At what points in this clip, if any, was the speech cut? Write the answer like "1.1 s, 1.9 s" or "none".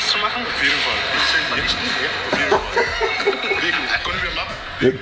none